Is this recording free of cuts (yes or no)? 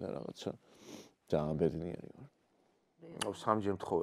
no